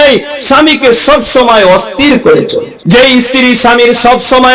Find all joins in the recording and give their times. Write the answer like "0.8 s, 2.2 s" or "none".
2.7 s